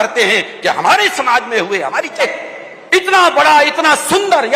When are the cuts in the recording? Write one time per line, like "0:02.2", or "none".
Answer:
0:02.2